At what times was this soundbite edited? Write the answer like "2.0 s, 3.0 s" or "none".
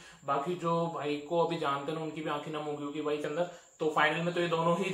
3.2 s